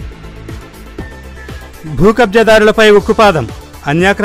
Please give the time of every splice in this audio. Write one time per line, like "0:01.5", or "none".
none